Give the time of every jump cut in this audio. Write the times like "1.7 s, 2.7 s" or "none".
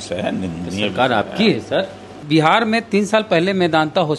2.0 s